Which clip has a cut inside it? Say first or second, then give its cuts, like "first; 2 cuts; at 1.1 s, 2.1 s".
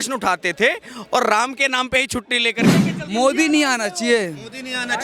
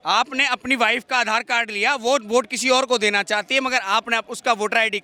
first; 1 cut; at 2.7 s